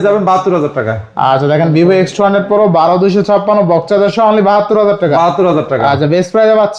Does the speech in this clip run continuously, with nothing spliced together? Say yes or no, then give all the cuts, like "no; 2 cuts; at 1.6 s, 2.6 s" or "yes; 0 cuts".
yes; 0 cuts